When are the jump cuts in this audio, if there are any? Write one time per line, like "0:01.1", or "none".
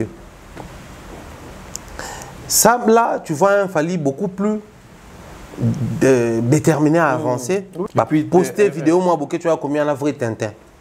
0:07.8